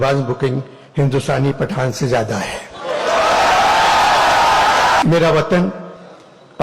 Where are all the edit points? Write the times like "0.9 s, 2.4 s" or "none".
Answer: 5.0 s